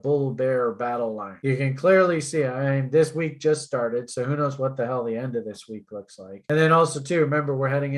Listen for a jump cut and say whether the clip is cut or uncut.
cut